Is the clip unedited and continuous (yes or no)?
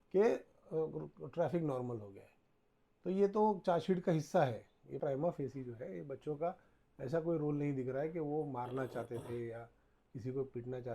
no